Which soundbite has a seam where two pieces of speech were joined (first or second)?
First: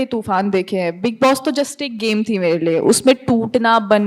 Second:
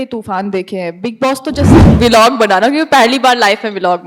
second